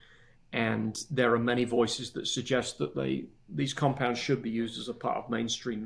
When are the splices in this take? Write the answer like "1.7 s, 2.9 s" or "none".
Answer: none